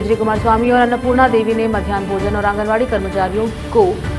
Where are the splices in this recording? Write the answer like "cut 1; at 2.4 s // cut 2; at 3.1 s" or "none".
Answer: none